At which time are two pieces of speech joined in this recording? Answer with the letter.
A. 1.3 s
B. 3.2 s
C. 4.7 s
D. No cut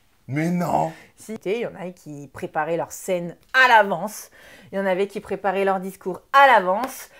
A